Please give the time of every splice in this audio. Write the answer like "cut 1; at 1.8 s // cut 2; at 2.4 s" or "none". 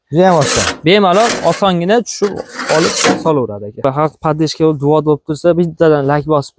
cut 1; at 3.8 s